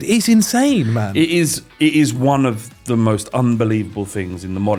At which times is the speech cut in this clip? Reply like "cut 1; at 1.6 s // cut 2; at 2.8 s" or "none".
none